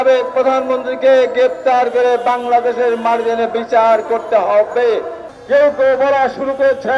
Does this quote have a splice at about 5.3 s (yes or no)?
yes